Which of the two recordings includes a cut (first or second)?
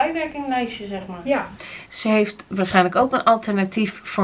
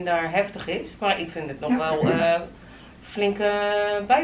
first